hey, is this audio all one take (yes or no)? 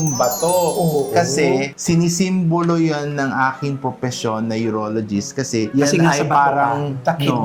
yes